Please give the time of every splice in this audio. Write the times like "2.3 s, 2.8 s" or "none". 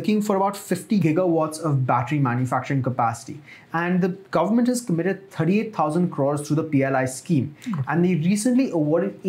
1.0 s

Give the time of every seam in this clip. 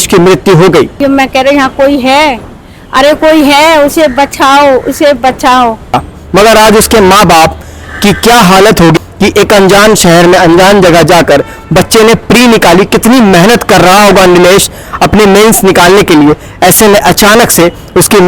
1.0 s, 6.0 s, 9.0 s

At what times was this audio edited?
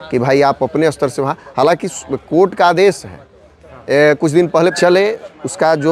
4.7 s

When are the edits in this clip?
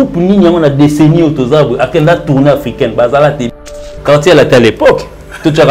3.7 s

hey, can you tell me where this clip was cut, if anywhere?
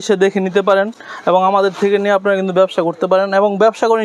none

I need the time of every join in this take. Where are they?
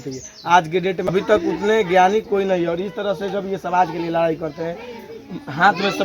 1.1 s

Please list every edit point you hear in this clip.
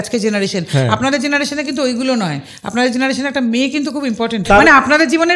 4.4 s

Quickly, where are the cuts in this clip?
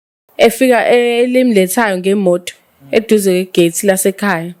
none

